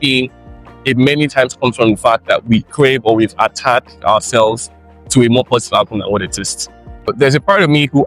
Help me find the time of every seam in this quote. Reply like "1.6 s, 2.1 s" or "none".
7.1 s